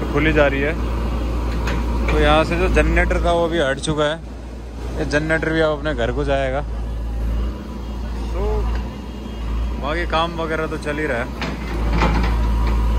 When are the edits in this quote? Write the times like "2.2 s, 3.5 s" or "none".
none